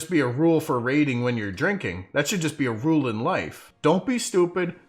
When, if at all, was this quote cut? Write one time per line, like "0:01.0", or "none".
0:03.6